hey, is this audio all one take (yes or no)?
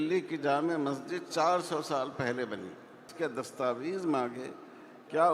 no